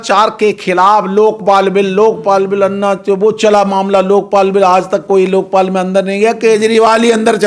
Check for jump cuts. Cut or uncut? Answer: uncut